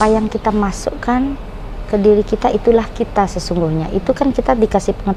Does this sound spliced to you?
no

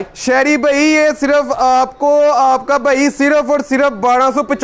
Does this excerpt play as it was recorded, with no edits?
yes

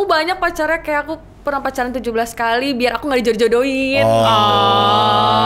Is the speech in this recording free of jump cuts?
yes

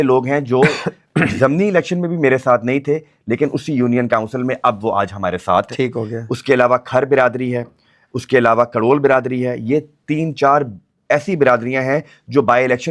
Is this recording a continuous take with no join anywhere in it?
yes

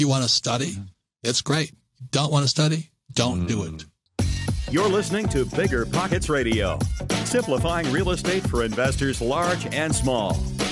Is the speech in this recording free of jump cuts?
no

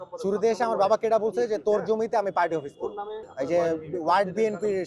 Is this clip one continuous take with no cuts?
no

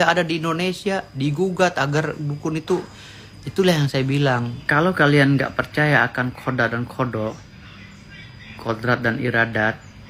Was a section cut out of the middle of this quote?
yes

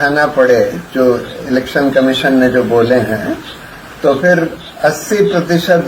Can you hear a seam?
no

